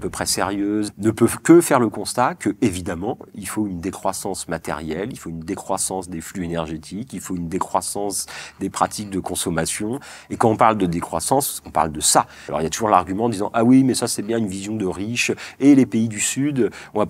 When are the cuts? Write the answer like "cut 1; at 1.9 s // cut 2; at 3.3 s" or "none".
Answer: cut 1; at 0.9 s // cut 2; at 12.5 s